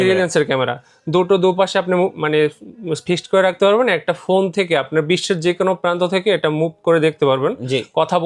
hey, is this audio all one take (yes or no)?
yes